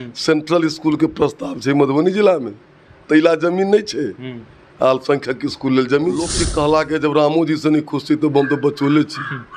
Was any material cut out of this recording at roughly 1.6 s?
no; 1 cut; at 6.4 s

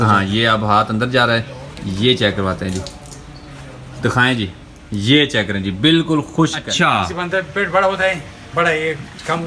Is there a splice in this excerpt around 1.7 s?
no; 1 cut; at 6.6 s

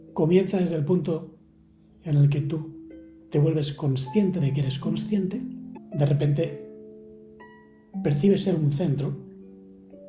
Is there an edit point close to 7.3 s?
no; 1 cut; at 5.7 s

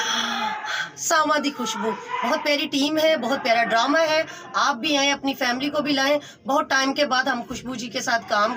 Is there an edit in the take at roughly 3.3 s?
no; 0 cuts

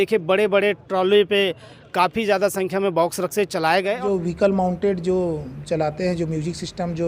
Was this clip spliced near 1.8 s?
no; 1 cut; at 4.0 s

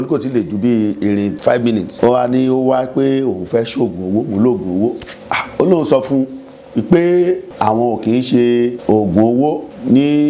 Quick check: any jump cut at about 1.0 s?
no; 0 cuts

